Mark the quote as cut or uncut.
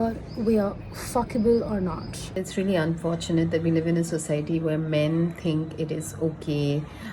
cut